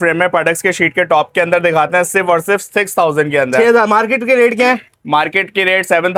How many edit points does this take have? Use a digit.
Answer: 0